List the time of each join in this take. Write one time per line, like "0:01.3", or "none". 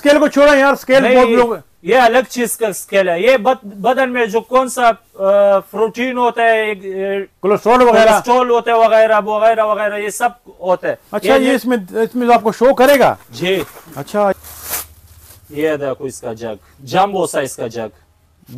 0:14.3